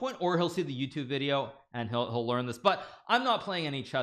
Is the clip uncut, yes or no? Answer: yes